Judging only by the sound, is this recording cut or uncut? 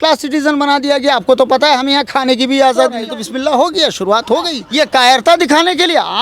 cut